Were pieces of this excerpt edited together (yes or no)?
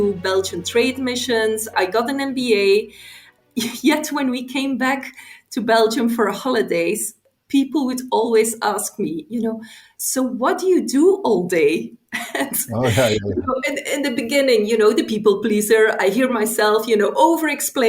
yes